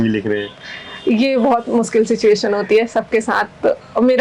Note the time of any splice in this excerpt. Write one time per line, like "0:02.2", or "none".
none